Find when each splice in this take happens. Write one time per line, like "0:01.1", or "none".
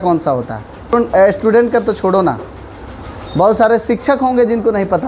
0:00.9